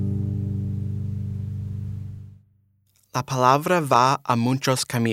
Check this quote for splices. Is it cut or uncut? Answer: uncut